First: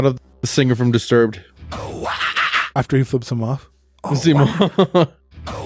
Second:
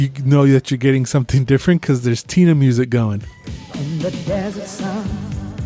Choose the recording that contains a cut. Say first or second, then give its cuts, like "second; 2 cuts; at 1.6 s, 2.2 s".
second; 1 cut; at 3.7 s